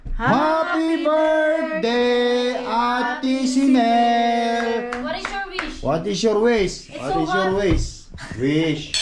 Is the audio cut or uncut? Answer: uncut